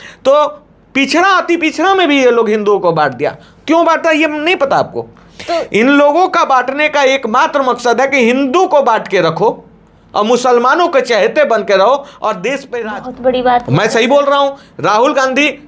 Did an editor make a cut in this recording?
yes; 1 cut; at 12.7 s

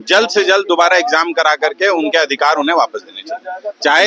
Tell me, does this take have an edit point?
no; 0 cuts

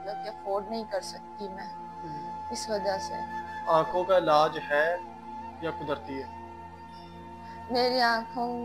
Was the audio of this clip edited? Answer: no; 0 cuts

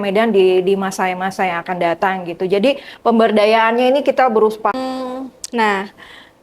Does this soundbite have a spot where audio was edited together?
yes; 1 cut; at 4.7 s

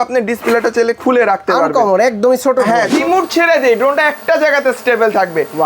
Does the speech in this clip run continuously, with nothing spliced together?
no; 1 cut; at 2.9 s

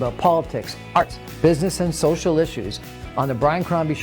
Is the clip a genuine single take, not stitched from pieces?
no; 1 cut; at 1.0 s

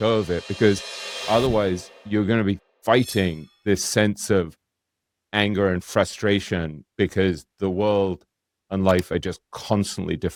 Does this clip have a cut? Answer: no; 0 cuts

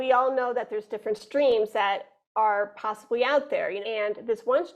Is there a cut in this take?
yes; 1 cut; at 3.8 s

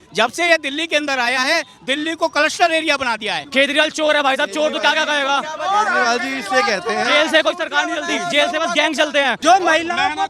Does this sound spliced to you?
yes; 2 cuts; at 3.4 s, 9.4 s

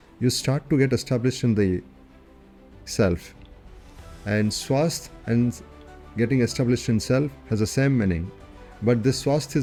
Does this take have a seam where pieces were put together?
no; 0 cuts

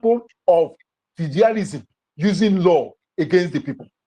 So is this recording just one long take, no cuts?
yes; 0 cuts

